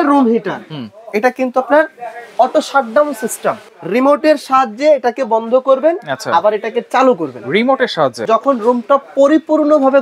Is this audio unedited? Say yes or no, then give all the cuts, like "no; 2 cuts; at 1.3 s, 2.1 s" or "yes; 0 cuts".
no; 2 cuts; at 3.7 s, 8.2 s